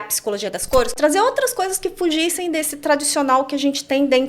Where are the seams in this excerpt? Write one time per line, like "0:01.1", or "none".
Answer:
0:00.9